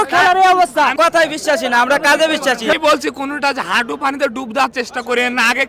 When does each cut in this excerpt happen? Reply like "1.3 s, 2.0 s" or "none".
0.9 s, 2.7 s